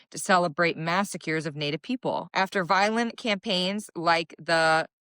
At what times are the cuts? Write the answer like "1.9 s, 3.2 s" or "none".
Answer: 2.3 s